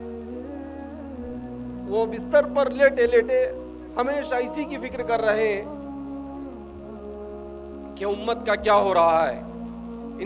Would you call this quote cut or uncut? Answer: uncut